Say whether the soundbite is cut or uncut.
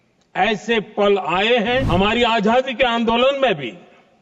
cut